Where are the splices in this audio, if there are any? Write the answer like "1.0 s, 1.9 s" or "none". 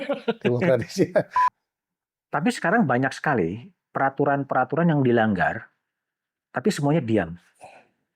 1.5 s